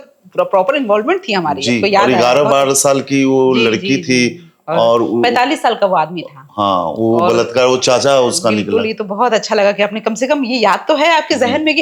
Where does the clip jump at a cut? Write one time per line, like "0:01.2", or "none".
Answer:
none

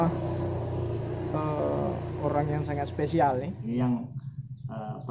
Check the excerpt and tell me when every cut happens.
0:03.5

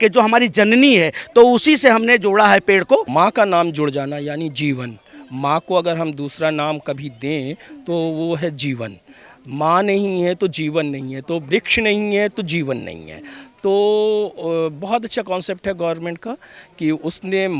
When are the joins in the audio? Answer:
0:03.1

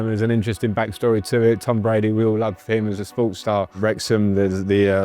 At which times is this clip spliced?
0:03.7

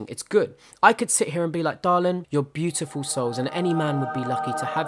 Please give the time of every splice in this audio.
0:02.2

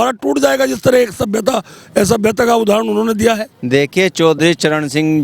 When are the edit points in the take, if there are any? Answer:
0:03.5

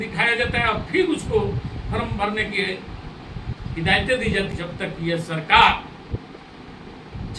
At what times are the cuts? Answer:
0:04.5

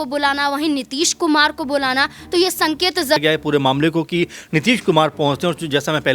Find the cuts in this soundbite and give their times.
0:03.2

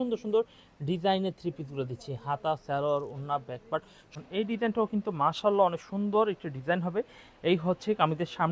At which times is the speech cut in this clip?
0:04.1

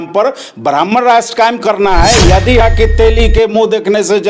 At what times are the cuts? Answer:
0:02.6

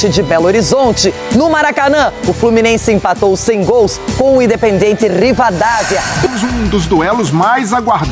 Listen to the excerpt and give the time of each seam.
0:06.3

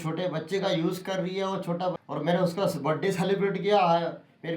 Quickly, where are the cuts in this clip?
0:02.0

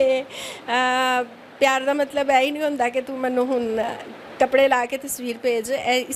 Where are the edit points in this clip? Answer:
none

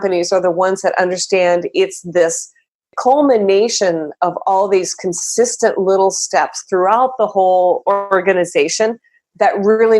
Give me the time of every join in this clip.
0:02.9

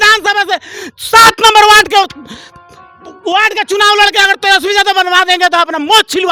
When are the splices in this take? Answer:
none

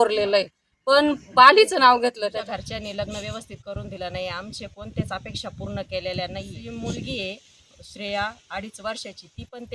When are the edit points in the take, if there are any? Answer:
0:02.3
0:06.6

